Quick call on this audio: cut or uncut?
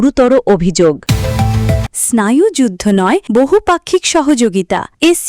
cut